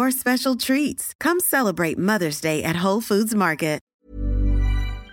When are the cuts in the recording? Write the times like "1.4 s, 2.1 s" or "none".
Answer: 3.9 s